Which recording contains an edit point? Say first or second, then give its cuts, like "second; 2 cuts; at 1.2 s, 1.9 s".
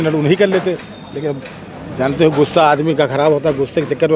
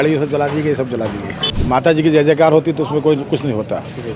second; 1 cut; at 1.4 s